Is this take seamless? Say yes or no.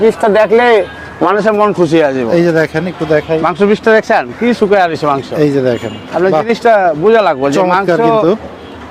yes